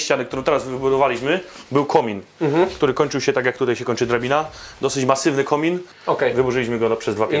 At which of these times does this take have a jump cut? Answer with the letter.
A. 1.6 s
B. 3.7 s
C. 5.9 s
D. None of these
C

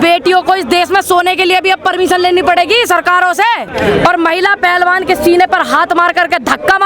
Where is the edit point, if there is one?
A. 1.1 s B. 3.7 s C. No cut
B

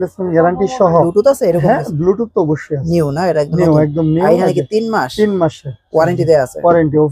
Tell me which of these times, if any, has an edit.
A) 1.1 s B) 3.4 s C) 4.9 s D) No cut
A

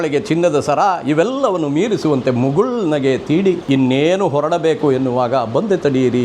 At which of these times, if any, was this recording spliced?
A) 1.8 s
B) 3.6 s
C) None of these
B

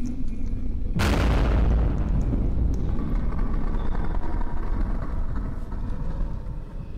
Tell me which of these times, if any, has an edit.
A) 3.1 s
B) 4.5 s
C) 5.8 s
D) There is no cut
D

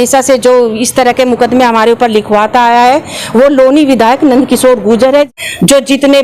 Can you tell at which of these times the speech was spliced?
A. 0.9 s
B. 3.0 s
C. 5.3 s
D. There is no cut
C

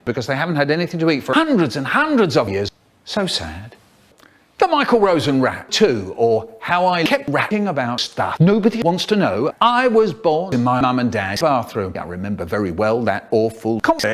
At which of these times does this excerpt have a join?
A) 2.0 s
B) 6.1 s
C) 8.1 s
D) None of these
D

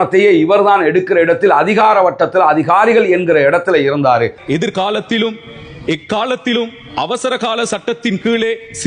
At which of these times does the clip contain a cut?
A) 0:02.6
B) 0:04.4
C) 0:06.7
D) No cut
B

